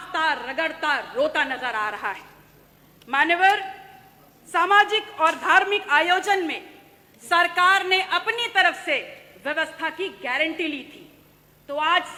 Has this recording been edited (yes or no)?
no